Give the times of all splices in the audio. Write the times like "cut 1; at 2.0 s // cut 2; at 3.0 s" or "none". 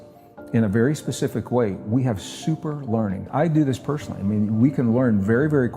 cut 1; at 3.3 s